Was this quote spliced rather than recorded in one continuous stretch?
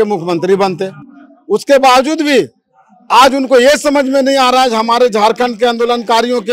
no; 0 cuts

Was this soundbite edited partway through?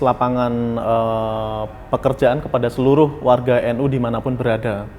no; 0 cuts

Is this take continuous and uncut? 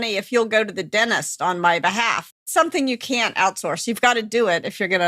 no; 1 cut; at 2.3 s

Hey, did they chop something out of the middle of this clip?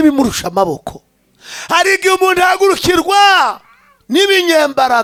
no; 0 cuts

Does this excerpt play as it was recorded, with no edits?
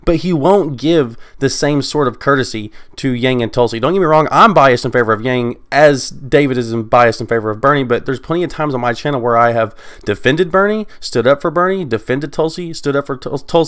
yes; 0 cuts

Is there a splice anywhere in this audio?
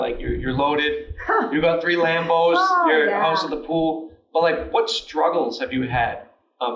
no; 0 cuts

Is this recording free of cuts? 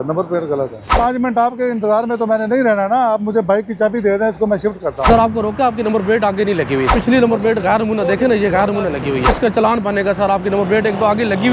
no; 4 cuts; at 0.9 s, 5.1 s, 7.0 s, 9.3 s

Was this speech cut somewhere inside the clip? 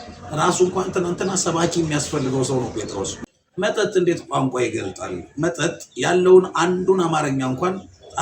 yes; 1 cut; at 3.2 s

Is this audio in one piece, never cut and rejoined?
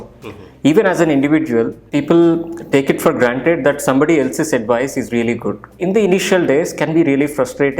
no; 2 cuts; at 1.8 s, 5.7 s

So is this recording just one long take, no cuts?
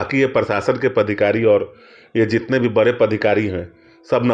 yes; 0 cuts

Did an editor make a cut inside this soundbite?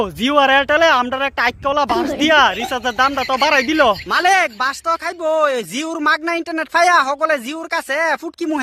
no; 0 cuts

